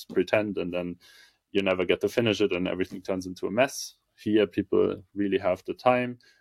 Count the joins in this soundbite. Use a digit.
0